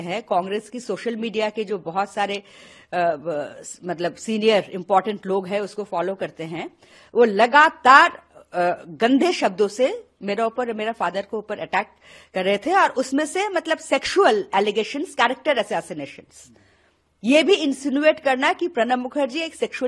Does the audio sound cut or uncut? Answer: uncut